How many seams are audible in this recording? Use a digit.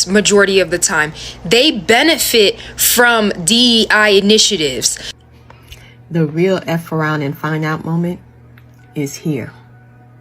1